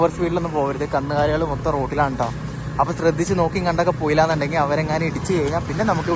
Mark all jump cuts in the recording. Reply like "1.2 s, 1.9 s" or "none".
none